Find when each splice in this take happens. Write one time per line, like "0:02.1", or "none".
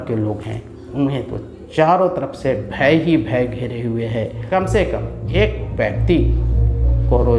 0:04.4